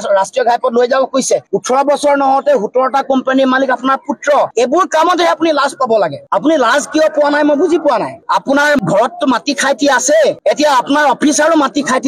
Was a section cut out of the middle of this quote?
yes; 2 cuts; at 1.5 s, 4.5 s

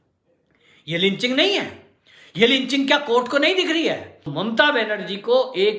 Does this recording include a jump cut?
yes; 1 cut; at 4.3 s

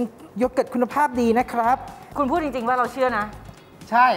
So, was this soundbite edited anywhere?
no; 0 cuts

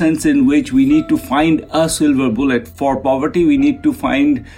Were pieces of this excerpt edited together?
yes; 1 cut; at 2.7 s

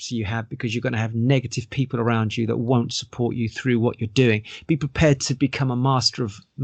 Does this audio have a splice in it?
no; 0 cuts

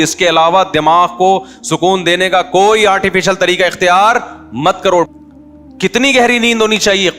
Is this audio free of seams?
no; 1 cut; at 5.1 s

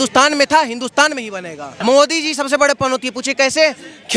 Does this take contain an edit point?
yes; 1 cut; at 1.7 s

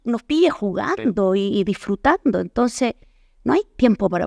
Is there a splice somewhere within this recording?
no; 0 cuts

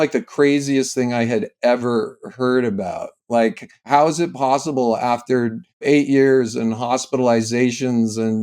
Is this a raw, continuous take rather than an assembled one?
no; 2 cuts; at 3.7 s, 5.8 s

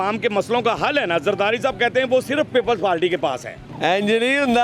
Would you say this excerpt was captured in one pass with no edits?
yes; 0 cuts

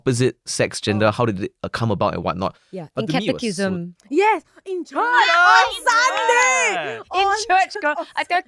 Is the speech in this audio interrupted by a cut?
no; 0 cuts

